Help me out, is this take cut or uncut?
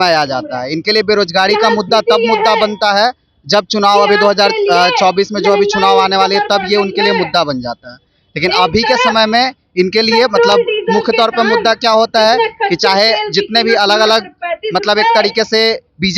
uncut